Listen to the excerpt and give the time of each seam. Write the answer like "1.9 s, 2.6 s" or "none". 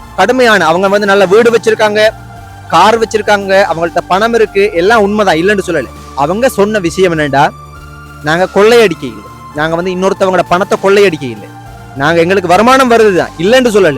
6.0 s

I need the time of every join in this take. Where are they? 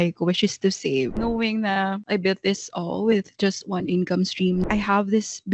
1.1 s, 2.0 s, 4.6 s

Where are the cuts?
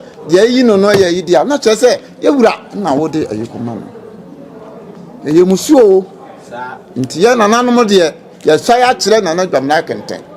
none

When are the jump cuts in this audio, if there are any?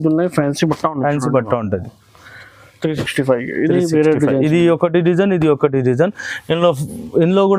none

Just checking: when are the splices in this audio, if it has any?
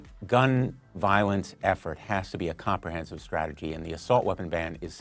none

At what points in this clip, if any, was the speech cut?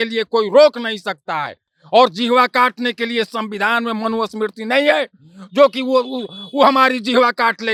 none

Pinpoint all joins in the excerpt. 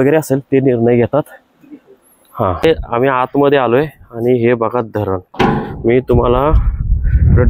2.6 s

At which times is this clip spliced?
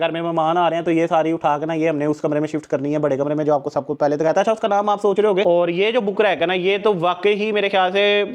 5.4 s

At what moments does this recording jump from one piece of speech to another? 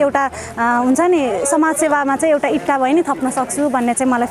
none

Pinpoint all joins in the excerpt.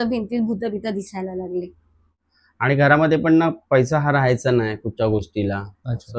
2.2 s

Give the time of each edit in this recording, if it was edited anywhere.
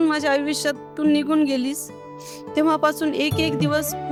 none

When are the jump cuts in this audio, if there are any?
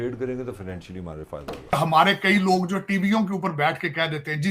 1.4 s

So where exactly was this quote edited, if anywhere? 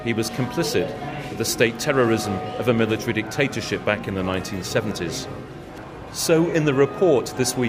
2.5 s

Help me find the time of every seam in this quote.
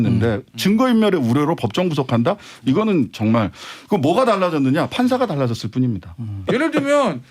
6.4 s

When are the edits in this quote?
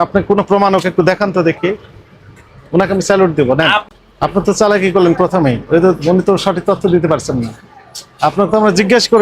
3.9 s

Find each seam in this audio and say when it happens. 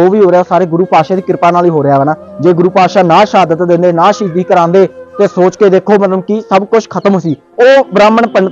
7.5 s

